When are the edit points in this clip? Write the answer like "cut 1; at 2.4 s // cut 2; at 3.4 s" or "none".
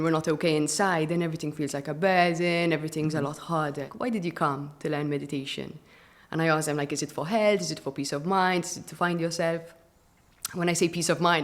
cut 1; at 3.9 s